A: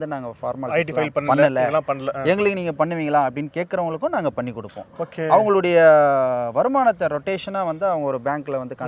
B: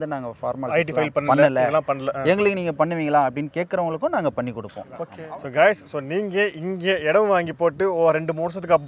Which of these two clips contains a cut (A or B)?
B